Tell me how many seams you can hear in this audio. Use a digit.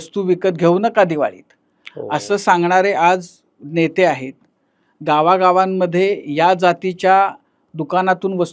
0